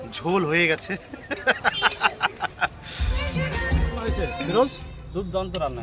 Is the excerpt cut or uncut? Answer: cut